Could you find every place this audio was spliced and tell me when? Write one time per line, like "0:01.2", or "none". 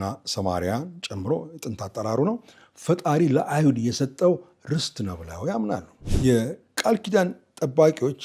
0:06.0